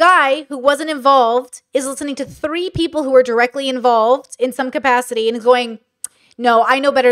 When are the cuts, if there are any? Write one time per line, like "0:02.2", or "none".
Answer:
none